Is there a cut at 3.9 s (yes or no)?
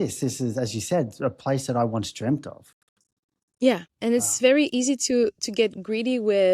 yes